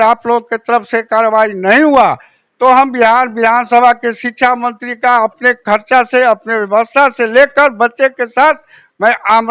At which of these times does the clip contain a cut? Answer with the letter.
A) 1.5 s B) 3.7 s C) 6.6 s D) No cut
D